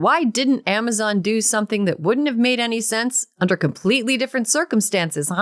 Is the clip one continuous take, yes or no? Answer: yes